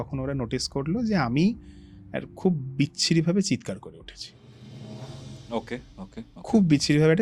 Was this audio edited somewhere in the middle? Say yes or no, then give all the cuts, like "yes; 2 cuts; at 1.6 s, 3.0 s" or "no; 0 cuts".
no; 0 cuts